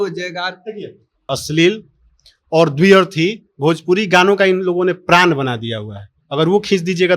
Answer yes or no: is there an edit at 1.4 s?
yes